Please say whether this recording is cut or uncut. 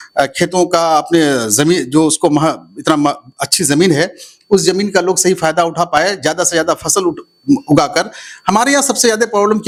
uncut